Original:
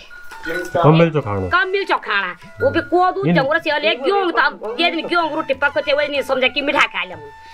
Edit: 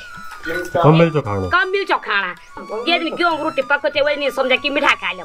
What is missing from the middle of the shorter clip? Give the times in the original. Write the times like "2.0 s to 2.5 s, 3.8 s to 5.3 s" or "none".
2.6 s to 4.5 s